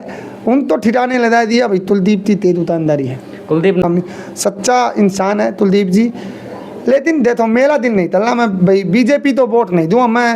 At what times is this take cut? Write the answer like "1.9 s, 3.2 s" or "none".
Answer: 3.8 s